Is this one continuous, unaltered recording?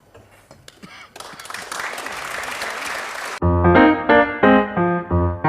no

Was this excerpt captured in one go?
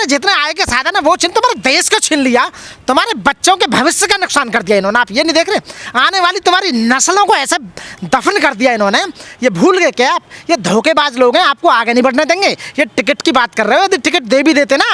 yes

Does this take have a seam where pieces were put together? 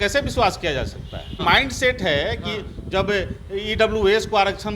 yes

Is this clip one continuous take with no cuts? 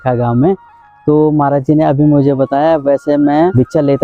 yes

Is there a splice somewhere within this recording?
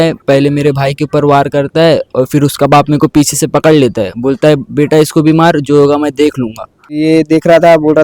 yes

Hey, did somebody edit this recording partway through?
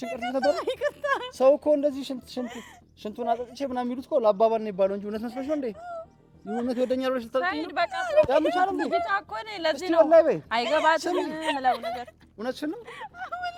no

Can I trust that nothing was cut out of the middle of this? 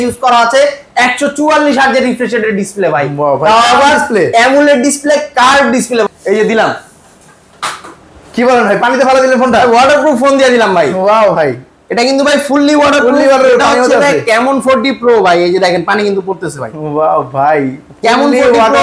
no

